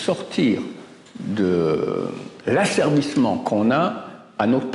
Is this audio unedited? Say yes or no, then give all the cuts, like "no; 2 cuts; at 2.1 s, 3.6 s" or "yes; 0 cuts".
yes; 0 cuts